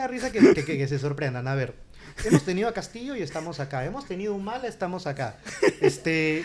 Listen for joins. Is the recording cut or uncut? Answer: uncut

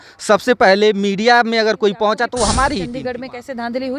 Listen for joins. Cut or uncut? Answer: cut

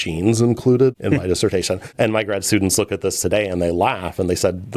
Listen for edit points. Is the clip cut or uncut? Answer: cut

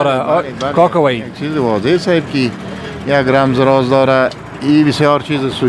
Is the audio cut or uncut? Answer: uncut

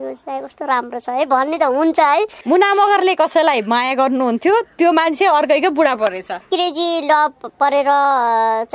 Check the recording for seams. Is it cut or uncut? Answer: cut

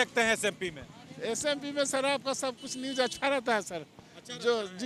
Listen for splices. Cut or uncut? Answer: uncut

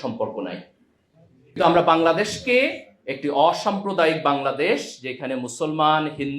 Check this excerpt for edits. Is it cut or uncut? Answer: cut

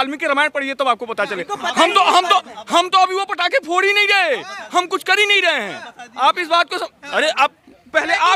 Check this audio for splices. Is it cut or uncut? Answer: uncut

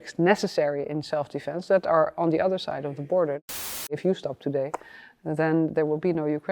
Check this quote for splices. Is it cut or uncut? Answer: cut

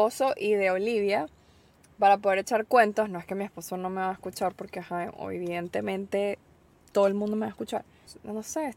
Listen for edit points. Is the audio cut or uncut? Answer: uncut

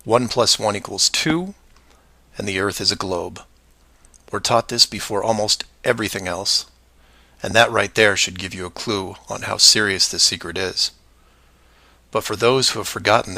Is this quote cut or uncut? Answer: uncut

